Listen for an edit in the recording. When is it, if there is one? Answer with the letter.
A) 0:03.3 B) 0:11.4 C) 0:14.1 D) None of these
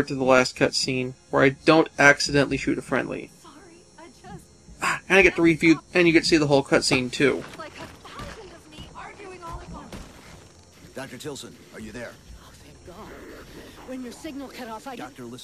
C